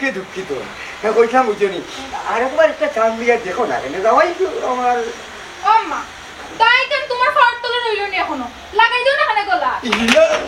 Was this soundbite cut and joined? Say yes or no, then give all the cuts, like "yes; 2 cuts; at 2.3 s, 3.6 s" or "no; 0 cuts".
no; 0 cuts